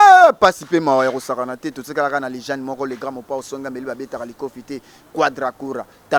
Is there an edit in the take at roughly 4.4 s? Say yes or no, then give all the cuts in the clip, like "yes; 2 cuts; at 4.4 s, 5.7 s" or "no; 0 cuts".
no; 0 cuts